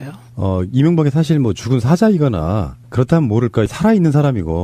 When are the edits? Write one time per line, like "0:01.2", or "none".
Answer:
0:02.8